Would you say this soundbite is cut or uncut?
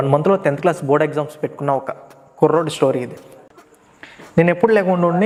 uncut